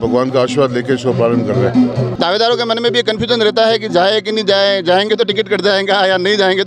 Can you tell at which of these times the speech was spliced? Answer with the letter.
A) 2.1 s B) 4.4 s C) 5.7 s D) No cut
A